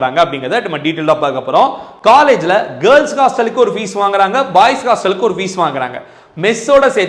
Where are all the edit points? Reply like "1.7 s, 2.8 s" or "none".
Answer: none